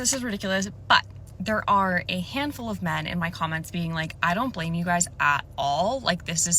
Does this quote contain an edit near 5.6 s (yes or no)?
no